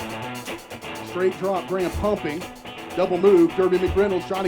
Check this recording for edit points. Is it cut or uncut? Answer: cut